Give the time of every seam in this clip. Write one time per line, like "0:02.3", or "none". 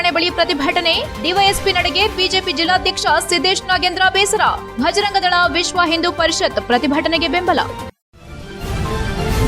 0:08.0